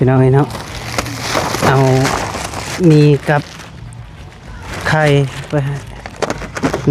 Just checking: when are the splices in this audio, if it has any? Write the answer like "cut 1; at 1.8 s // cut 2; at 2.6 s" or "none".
none